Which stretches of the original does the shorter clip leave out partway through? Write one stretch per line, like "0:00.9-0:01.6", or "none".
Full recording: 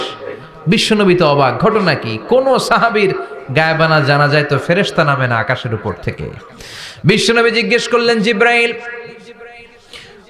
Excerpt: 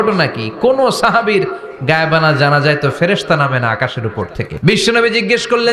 0:06.1-0:06.9